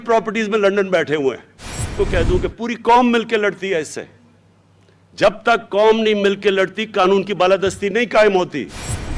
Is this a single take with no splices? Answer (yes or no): no